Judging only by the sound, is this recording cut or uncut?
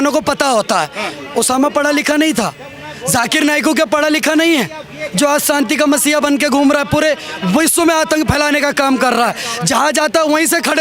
uncut